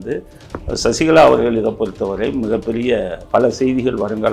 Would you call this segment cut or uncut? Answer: cut